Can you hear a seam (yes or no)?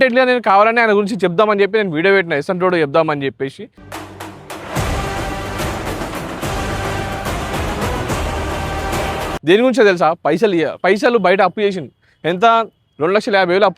yes